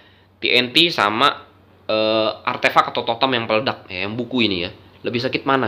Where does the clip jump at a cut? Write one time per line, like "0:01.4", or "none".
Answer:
none